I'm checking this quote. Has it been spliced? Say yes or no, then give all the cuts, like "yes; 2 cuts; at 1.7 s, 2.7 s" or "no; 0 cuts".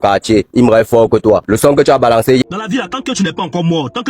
yes; 1 cut; at 2.4 s